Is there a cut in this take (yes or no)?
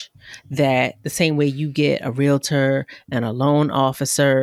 no